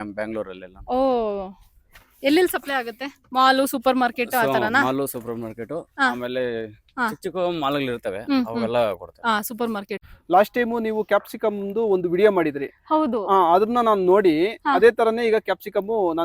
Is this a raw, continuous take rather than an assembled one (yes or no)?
no